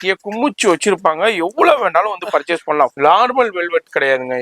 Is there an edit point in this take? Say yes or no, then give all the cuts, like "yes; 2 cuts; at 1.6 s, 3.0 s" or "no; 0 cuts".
yes; 1 cut; at 2.9 s